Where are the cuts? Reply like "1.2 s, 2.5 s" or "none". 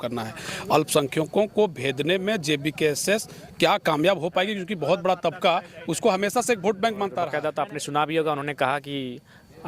7.3 s